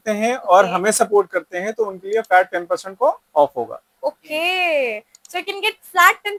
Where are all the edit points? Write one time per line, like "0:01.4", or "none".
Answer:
none